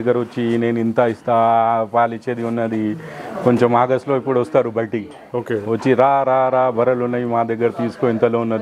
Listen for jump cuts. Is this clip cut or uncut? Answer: uncut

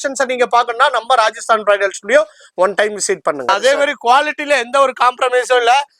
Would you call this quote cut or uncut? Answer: cut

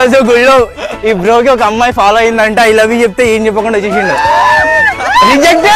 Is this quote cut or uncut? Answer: uncut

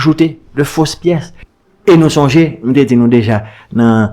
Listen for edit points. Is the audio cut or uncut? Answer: cut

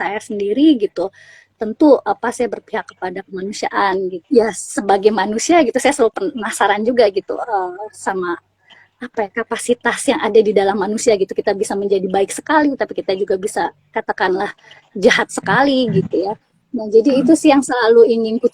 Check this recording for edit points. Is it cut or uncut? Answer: cut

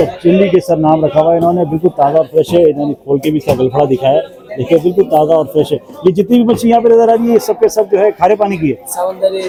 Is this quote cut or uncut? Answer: uncut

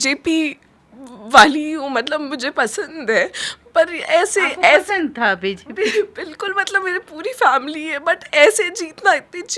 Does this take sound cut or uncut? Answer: uncut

